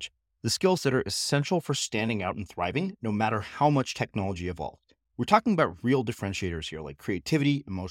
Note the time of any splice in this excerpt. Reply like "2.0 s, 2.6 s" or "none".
none